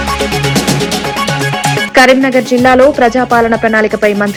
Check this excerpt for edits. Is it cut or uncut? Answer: uncut